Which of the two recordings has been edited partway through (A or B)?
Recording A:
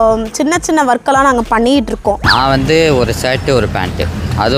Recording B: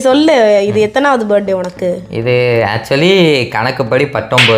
A